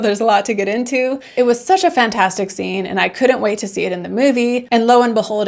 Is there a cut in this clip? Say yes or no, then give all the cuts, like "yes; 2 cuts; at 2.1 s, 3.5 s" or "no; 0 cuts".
yes; 1 cut; at 1.2 s